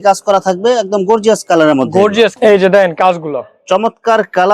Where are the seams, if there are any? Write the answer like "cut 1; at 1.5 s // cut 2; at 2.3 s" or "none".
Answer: cut 1; at 2.3 s